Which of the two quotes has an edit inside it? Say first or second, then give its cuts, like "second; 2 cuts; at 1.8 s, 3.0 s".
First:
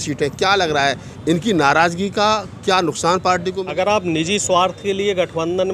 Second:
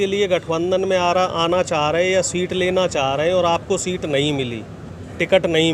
first; 1 cut; at 3.6 s